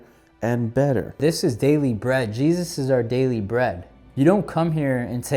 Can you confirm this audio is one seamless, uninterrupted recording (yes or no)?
no